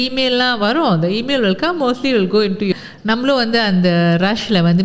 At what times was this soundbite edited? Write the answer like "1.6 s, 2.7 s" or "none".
2.7 s